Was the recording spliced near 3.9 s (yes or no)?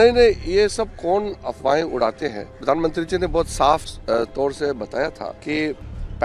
yes